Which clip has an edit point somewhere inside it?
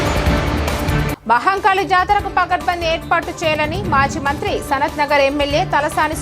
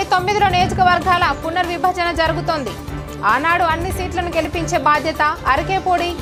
first; 1 cut; at 1.0 s

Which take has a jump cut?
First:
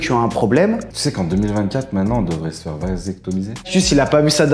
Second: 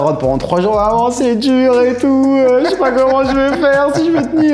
first; 2 cuts; at 1.0 s, 3.7 s

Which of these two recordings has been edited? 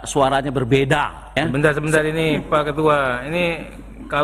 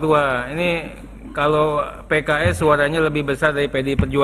first; 1 cut; at 1.4 s

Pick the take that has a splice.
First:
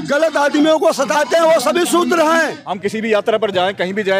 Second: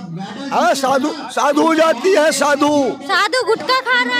first; 1 cut; at 2.6 s

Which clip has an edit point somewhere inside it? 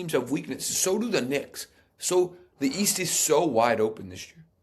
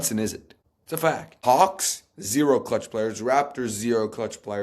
second; 1 cut; at 1.0 s

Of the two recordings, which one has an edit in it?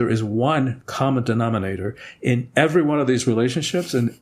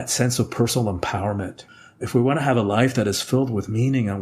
second; 1 cut; at 1.6 s

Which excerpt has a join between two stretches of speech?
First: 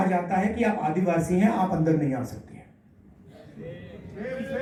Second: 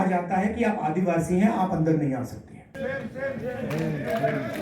second; 1 cut; at 2.8 s

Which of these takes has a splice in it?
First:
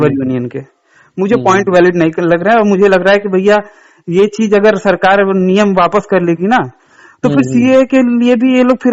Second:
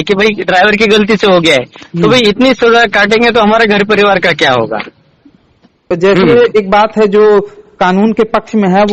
second; 1 cut; at 5.8 s

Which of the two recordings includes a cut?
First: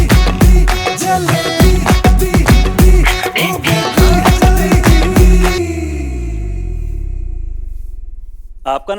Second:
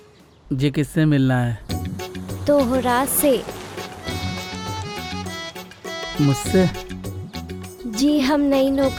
first; 1 cut; at 5.6 s

